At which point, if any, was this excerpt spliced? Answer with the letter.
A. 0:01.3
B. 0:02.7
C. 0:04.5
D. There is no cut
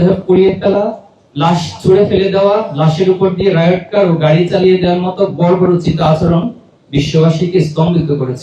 D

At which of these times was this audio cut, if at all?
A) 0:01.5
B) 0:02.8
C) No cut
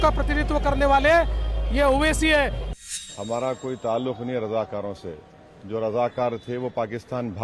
B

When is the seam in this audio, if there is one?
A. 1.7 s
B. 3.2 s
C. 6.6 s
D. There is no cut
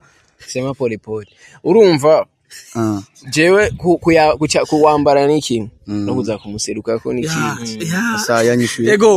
D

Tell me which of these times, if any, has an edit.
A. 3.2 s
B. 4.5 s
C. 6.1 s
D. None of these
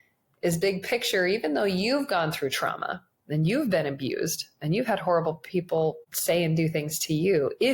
C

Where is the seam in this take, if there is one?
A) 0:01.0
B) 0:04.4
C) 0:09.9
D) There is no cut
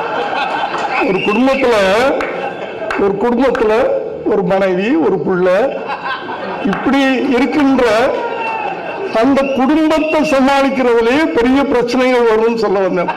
A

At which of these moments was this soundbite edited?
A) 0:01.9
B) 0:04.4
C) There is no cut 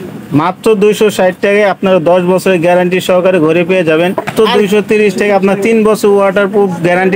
B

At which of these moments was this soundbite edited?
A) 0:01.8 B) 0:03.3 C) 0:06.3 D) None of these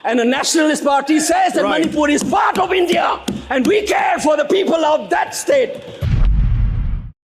D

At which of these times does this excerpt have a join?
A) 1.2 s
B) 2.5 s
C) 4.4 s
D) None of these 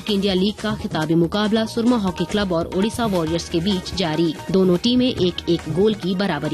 C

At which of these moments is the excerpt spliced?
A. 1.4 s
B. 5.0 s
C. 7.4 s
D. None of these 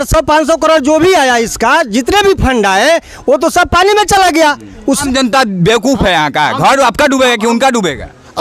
B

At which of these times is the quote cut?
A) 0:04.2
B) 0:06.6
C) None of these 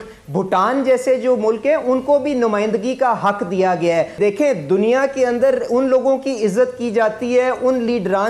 A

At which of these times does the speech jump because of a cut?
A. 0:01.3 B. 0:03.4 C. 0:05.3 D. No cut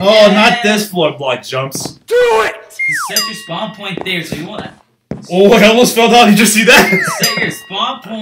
D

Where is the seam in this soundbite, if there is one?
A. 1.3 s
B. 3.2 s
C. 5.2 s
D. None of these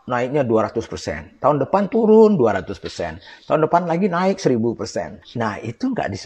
C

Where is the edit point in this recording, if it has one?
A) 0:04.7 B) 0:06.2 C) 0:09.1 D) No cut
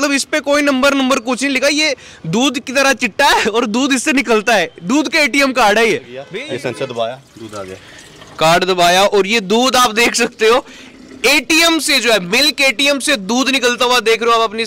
B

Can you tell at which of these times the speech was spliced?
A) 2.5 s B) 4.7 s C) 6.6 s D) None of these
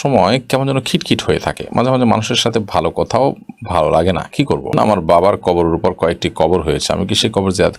B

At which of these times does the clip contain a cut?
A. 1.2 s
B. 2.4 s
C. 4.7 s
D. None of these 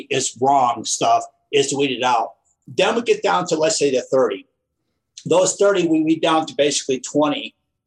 D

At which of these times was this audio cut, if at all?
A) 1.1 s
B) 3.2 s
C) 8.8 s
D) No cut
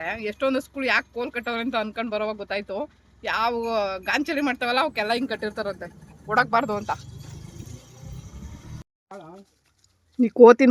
C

